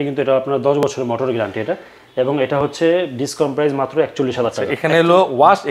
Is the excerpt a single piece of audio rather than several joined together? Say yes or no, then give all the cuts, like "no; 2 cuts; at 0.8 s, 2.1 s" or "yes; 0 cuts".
no; 1 cut; at 4.7 s